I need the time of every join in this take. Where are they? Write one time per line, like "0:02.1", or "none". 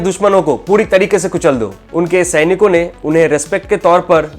0:01.8